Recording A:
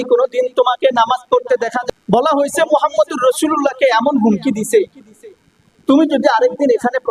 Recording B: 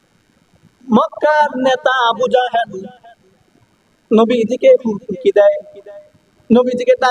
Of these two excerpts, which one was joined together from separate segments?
A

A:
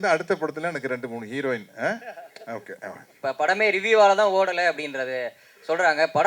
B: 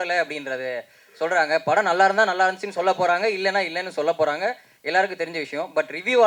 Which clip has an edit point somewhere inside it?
A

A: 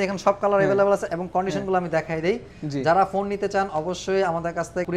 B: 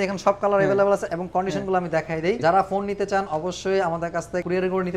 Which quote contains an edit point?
B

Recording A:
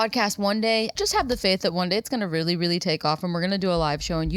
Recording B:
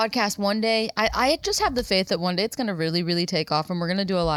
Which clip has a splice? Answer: A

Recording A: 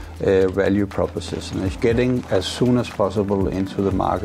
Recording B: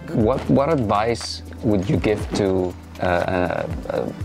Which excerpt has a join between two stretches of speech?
A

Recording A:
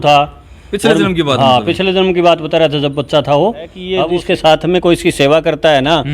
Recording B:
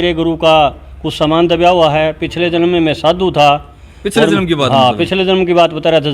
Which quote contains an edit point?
A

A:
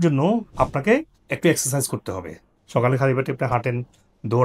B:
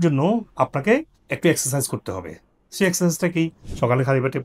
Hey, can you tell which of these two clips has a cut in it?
A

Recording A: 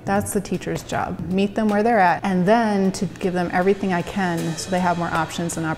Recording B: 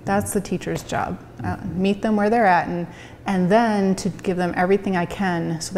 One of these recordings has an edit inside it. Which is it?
A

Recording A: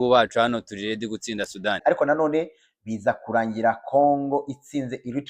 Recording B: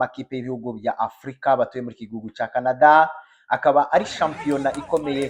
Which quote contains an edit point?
A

